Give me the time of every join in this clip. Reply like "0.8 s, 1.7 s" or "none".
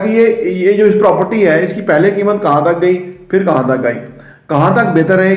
none